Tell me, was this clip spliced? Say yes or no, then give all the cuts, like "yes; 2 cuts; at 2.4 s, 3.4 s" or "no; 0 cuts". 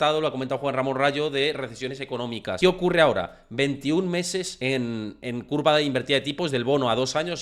yes; 2 cuts; at 2.6 s, 4.5 s